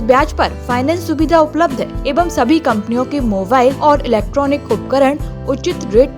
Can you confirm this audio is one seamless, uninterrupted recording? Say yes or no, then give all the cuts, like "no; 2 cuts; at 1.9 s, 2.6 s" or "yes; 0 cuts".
no; 2 cuts; at 2.0 s, 3.8 s